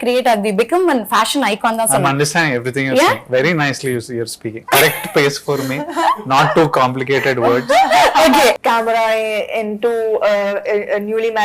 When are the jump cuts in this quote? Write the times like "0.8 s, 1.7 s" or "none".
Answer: 8.6 s